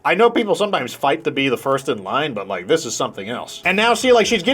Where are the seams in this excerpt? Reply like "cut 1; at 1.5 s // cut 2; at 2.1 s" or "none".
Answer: cut 1; at 3.5 s